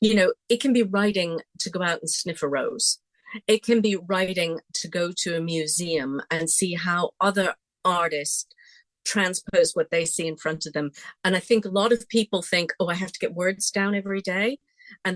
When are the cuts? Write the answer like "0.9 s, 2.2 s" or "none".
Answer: 11.2 s